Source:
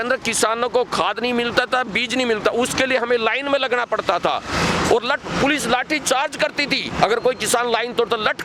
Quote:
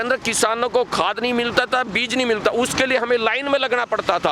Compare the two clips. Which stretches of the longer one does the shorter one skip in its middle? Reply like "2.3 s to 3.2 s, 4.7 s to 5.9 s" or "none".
none